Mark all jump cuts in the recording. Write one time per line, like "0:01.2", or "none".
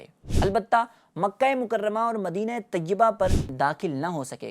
0:03.4